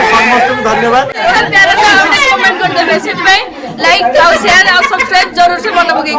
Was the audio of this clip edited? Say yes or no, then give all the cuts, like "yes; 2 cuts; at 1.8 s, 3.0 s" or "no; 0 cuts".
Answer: yes; 1 cut; at 1.1 s